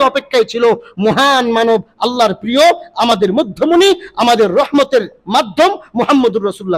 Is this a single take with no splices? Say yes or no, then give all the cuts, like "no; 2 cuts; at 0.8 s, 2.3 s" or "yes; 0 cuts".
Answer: yes; 0 cuts